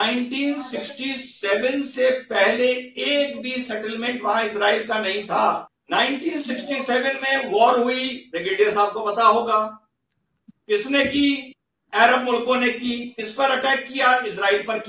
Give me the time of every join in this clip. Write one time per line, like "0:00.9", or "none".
0:05.7